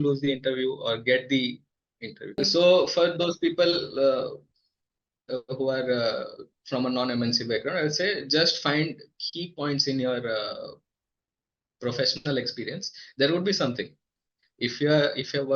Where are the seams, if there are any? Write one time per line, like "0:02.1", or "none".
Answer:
0:02.3